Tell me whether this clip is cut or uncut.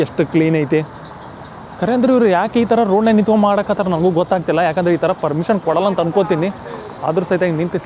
uncut